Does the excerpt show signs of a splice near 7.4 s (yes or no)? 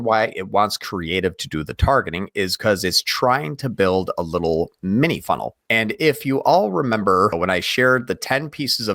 yes